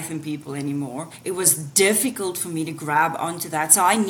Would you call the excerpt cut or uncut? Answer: cut